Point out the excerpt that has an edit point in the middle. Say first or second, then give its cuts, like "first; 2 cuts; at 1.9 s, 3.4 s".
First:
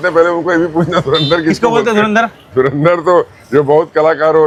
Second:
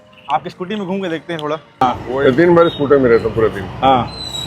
second; 1 cut; at 1.8 s